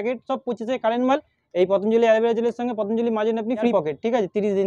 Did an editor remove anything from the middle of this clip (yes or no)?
yes